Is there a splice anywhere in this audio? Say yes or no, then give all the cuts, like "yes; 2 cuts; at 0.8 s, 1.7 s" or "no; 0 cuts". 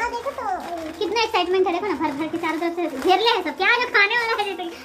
no; 0 cuts